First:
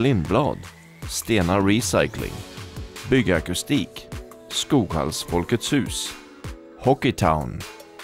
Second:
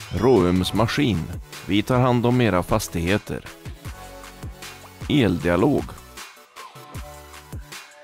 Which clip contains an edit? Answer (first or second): second